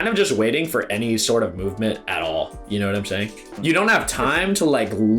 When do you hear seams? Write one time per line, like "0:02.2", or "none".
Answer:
0:03.5